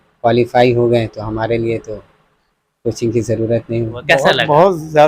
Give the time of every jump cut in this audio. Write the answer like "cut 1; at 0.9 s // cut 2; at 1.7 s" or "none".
cut 1; at 4.0 s